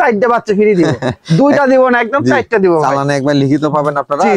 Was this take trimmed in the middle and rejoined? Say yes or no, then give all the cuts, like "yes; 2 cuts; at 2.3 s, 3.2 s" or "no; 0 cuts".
no; 0 cuts